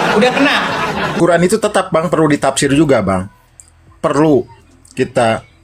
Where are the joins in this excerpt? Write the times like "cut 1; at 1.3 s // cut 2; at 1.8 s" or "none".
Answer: cut 1; at 1.1 s